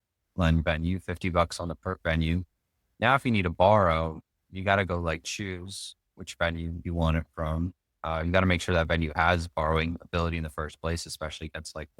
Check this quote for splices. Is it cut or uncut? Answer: uncut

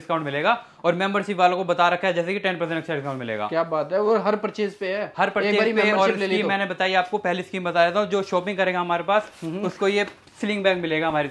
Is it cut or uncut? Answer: uncut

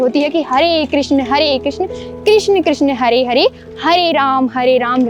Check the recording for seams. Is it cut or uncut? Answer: uncut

